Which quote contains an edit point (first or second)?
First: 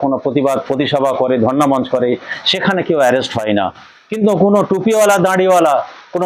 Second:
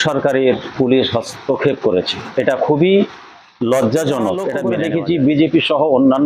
second